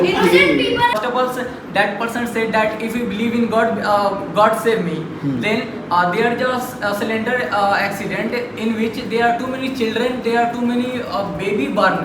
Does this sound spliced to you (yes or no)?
yes